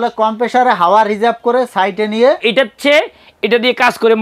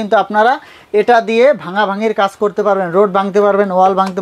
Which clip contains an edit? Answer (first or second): first